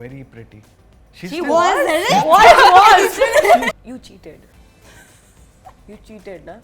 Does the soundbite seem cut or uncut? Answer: cut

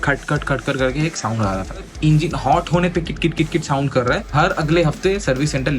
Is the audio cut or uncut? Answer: cut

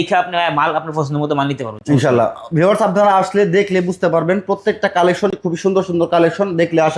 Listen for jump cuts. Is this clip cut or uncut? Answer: uncut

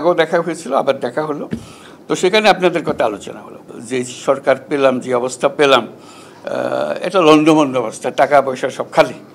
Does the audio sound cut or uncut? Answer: cut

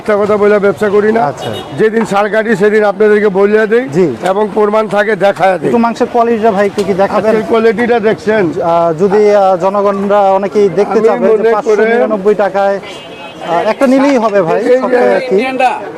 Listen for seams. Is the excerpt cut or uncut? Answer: uncut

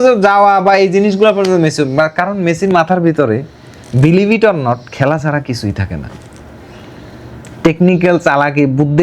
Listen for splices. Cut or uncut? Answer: uncut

